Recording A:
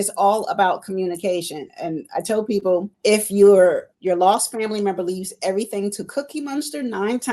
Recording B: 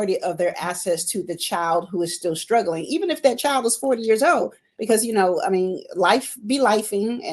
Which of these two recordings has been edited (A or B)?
A